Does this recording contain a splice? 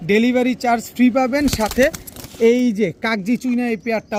no; 0 cuts

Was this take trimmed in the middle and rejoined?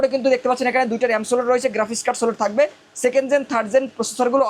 no; 0 cuts

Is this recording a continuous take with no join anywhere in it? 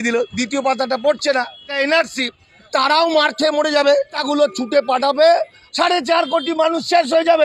no; 4 cuts; at 1.7 s, 2.7 s, 4.2 s, 5.6 s

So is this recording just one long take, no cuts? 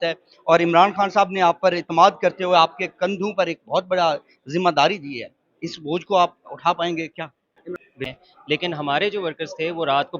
no; 1 cut; at 7.8 s

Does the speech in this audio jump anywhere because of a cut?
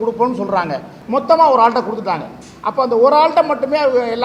yes; 1 cut; at 1.0 s

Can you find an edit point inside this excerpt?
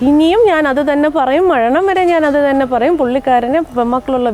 no; 0 cuts

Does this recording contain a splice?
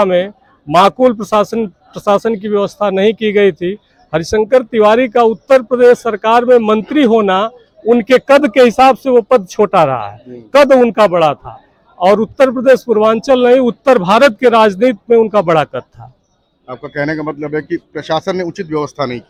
no; 0 cuts

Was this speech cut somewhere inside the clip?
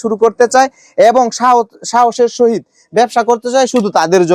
no; 0 cuts

